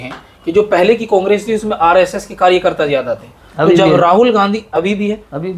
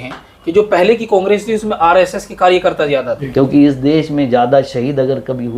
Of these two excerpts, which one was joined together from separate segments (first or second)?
second